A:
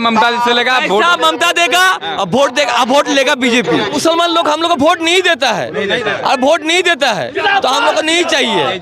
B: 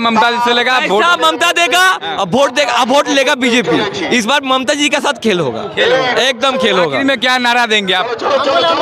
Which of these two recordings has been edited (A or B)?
A